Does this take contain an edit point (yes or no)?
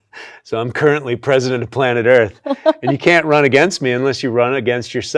no